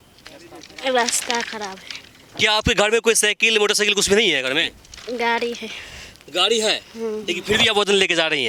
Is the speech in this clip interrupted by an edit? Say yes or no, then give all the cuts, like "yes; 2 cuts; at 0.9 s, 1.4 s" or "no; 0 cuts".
no; 0 cuts